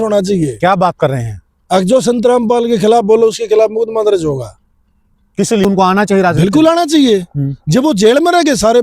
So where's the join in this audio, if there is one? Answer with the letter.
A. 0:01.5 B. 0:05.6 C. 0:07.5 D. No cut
B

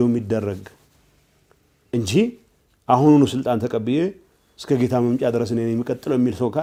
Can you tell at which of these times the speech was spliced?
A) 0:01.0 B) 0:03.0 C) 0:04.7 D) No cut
D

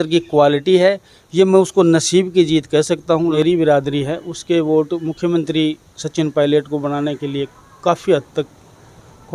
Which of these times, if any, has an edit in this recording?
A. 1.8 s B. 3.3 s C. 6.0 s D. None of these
B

